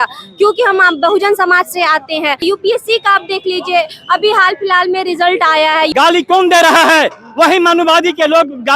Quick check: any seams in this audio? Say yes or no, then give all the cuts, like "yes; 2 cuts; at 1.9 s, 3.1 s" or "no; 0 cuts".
yes; 2 cuts; at 2.4 s, 5.9 s